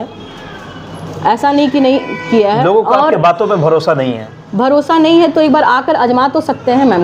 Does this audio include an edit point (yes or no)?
no